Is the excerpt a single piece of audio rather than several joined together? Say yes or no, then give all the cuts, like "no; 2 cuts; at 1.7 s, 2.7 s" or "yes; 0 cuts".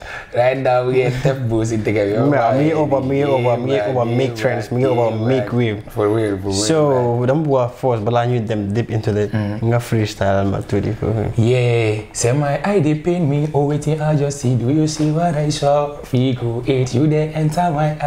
yes; 0 cuts